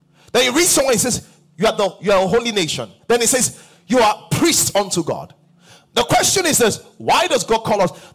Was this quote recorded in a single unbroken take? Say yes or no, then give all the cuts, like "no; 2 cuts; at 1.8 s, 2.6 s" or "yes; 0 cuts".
yes; 0 cuts